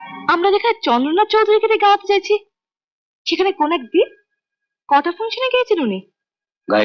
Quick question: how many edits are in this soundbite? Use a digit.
0